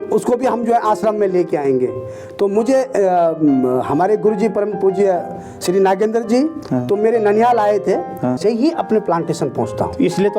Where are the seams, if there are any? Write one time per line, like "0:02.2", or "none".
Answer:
0:08.4